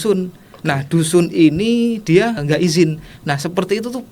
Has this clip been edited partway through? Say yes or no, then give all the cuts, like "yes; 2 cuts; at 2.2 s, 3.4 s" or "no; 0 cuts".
yes; 1 cut; at 2.4 s